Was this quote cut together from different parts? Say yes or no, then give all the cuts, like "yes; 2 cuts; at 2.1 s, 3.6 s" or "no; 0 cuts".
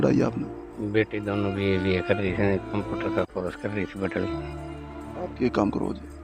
no; 0 cuts